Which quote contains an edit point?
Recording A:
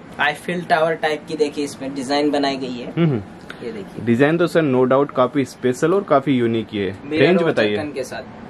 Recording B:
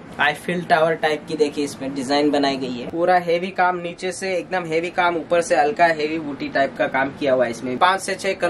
B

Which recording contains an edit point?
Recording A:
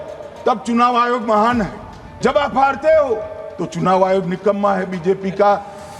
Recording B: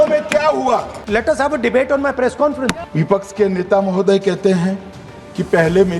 B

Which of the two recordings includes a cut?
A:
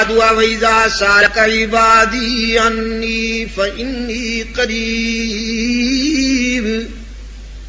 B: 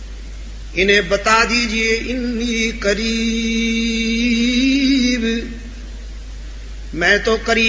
A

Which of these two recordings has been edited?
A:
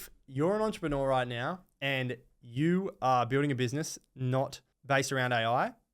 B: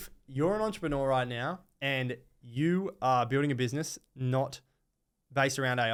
A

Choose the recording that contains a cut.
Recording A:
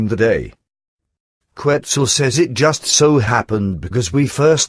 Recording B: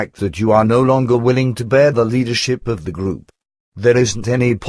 B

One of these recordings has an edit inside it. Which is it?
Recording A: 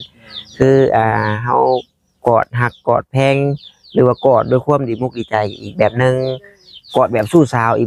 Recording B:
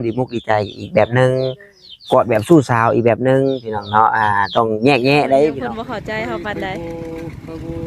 B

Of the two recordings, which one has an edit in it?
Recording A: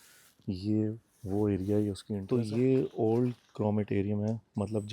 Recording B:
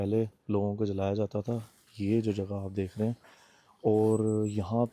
A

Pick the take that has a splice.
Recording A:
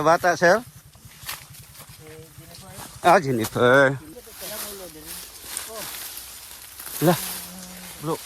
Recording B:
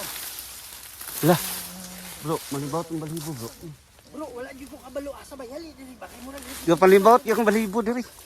A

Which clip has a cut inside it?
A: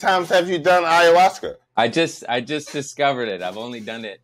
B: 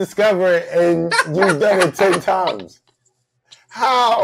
A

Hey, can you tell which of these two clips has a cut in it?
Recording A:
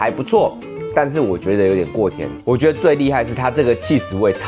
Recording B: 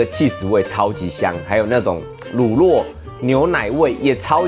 A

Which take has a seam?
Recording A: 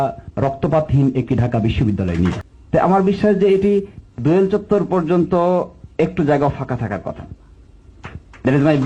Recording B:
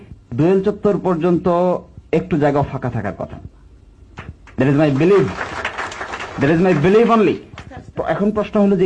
A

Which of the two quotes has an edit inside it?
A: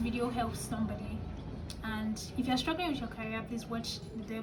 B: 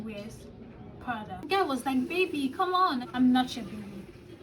B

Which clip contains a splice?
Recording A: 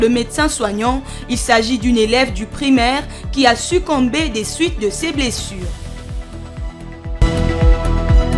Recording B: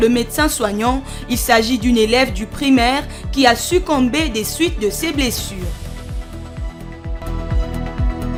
A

